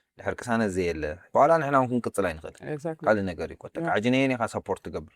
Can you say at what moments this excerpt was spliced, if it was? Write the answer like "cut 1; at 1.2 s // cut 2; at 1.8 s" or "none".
cut 1; at 1.3 s